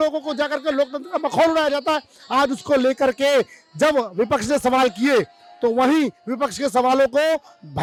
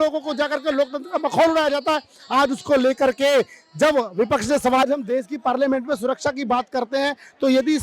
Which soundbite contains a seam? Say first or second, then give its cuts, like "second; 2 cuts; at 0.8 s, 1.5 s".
second; 1 cut; at 4.8 s